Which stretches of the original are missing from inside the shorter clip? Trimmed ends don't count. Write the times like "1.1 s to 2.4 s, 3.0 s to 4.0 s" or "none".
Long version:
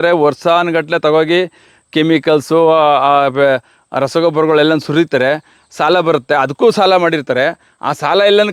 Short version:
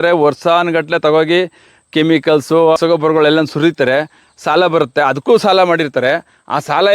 2.8 s to 4.1 s